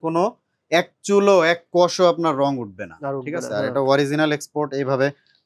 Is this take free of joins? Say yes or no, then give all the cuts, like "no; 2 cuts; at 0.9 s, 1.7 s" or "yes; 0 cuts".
yes; 0 cuts